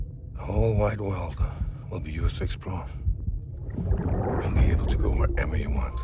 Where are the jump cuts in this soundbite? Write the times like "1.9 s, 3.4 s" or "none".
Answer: none